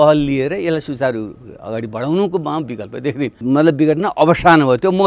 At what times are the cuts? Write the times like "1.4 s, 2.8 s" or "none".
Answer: 3.4 s